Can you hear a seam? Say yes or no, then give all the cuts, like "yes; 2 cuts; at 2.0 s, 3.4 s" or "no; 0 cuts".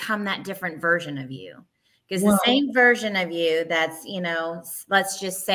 no; 0 cuts